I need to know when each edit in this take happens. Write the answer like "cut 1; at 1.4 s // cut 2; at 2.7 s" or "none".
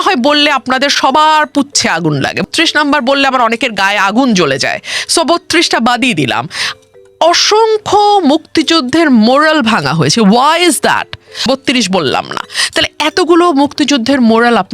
cut 1; at 2.4 s // cut 2; at 11.4 s